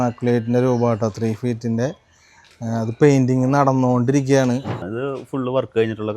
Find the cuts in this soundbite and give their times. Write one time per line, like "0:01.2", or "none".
0:04.8